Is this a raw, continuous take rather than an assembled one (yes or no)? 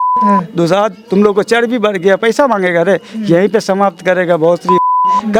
yes